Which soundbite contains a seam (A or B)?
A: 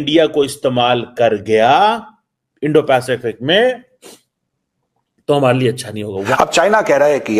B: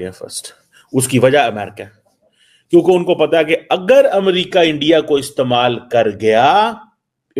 A